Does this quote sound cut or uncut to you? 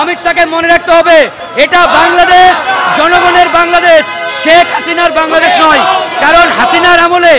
uncut